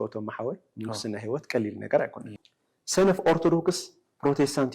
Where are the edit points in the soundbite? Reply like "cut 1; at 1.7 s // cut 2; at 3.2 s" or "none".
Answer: cut 1; at 2.3 s